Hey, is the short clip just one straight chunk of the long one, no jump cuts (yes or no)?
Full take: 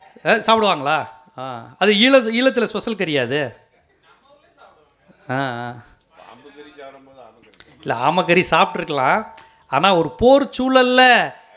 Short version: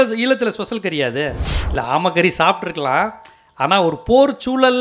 no